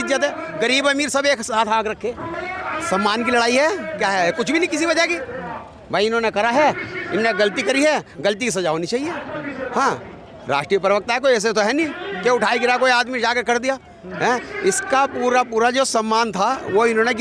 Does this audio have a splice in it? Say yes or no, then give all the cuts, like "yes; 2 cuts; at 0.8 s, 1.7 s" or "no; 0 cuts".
yes; 1 cut; at 2.3 s